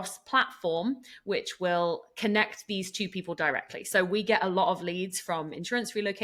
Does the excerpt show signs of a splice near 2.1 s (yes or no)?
no